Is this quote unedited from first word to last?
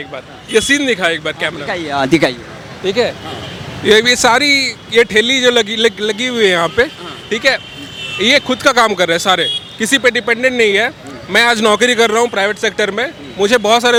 yes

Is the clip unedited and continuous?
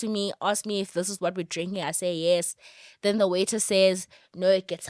yes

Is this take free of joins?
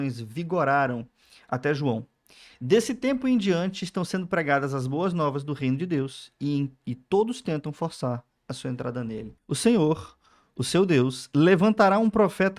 no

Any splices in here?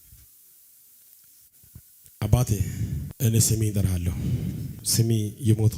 yes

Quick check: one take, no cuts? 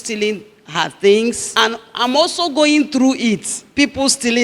no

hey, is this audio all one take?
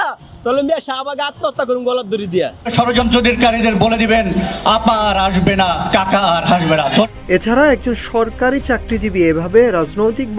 no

